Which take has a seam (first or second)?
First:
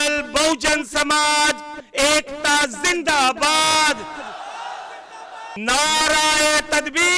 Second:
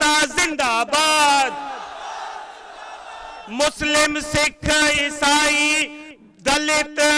first